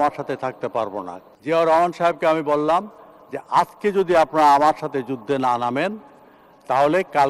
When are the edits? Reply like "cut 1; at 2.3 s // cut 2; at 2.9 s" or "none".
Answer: cut 1; at 1.2 s